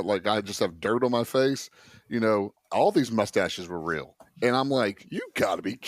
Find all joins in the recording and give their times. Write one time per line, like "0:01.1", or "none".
none